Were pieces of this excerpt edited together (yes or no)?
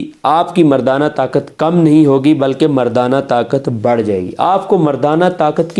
no